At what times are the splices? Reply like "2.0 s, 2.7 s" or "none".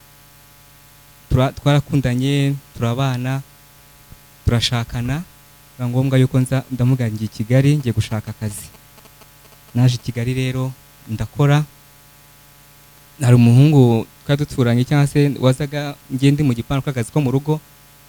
none